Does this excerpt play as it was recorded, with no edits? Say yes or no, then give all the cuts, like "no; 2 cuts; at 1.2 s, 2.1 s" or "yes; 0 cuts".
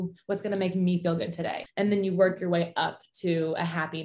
no; 1 cut; at 1.6 s